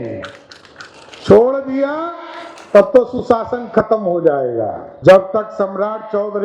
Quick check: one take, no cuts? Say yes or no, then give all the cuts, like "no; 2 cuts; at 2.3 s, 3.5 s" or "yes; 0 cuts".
no; 1 cut; at 4.8 s